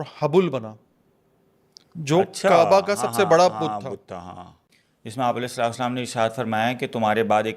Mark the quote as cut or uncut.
cut